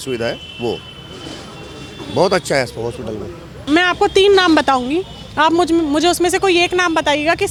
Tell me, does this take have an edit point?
no; 0 cuts

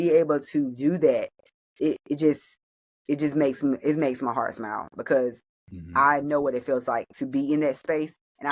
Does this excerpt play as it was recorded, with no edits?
yes; 0 cuts

